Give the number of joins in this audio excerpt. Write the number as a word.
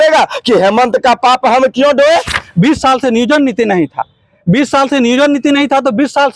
one